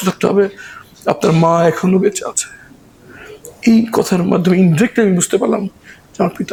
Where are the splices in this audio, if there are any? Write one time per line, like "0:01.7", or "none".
none